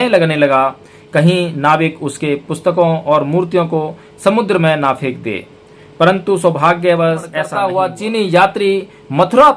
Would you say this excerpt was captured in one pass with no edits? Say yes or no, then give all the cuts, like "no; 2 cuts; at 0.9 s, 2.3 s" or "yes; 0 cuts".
no; 1 cut; at 7.4 s